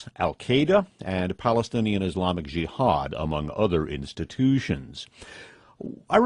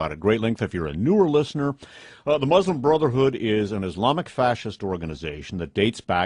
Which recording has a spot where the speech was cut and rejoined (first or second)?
second